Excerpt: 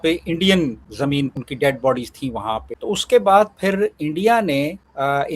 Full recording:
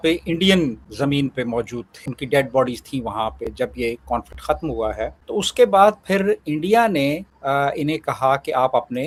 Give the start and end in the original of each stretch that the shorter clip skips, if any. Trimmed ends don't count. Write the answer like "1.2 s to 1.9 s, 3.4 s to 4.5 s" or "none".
1.3 s to 2.1 s, 3.4 s to 5.2 s